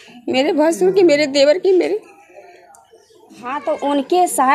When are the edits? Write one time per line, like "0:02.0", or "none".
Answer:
0:03.5